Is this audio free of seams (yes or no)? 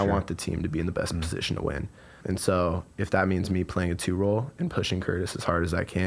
no